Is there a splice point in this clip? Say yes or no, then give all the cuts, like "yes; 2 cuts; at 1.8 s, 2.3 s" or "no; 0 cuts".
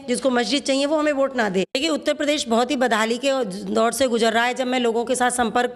yes; 1 cut; at 1.8 s